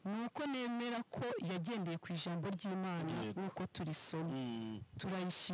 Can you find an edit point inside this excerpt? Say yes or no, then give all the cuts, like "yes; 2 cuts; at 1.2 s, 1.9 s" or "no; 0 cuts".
no; 0 cuts